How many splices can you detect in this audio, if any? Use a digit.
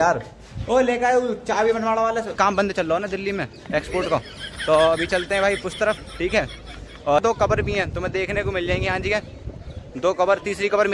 2